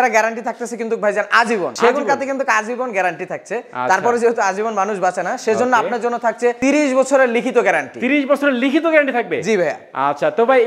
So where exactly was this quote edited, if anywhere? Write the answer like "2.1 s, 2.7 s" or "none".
none

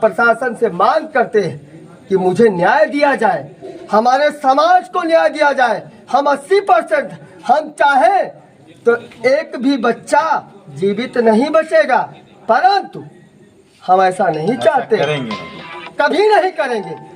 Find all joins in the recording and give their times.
none

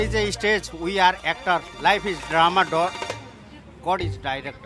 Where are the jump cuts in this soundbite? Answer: none

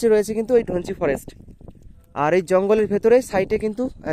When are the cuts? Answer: none

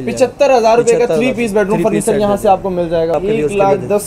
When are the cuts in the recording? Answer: 3.1 s

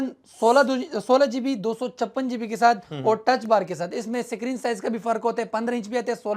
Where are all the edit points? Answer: none

